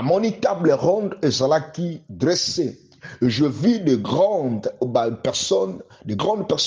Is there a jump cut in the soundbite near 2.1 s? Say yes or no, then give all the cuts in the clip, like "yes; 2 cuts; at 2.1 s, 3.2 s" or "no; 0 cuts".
no; 0 cuts